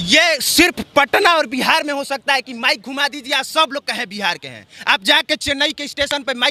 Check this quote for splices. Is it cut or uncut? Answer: uncut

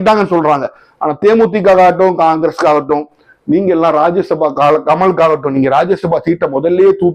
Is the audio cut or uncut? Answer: uncut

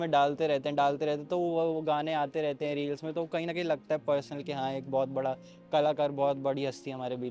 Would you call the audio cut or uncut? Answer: uncut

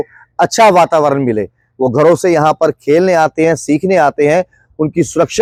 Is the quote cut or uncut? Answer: uncut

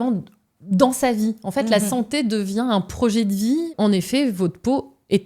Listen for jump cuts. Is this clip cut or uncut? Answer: cut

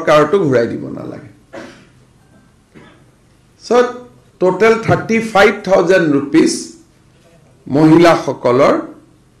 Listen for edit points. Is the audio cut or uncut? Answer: uncut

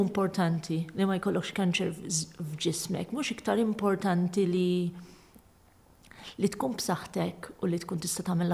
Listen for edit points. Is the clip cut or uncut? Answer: uncut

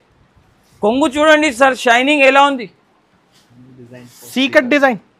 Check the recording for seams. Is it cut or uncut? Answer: uncut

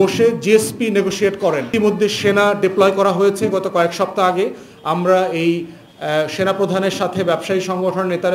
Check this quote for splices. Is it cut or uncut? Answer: cut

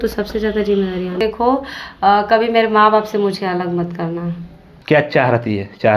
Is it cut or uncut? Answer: cut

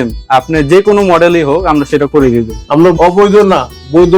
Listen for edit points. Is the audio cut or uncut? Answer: cut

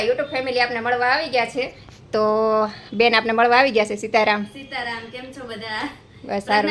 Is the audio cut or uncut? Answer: uncut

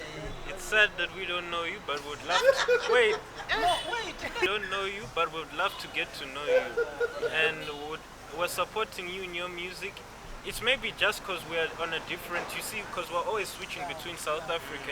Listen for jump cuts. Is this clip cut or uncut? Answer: cut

